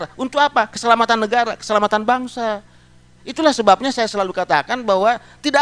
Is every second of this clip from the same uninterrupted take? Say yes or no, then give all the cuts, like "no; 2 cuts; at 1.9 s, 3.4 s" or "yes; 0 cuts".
no; 1 cut; at 3.2 s